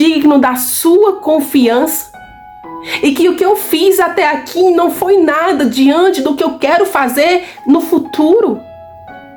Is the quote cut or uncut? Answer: uncut